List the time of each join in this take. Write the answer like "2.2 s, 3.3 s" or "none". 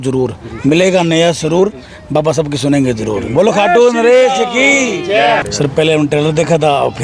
5.4 s